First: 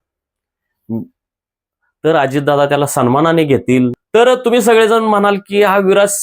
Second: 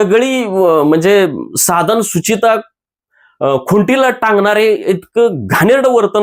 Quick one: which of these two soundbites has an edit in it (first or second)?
first